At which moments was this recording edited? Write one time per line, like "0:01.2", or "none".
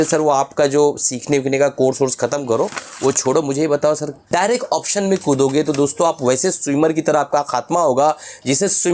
0:04.1